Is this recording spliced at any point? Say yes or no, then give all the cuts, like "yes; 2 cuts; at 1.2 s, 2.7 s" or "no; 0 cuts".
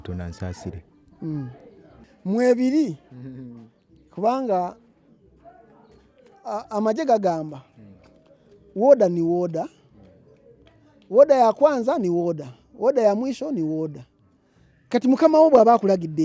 yes; 1 cut; at 2.0 s